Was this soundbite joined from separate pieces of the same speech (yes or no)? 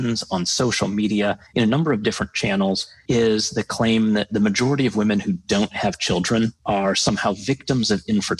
yes